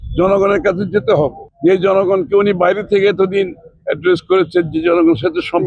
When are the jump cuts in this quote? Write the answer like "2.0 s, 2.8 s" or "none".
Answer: 1.4 s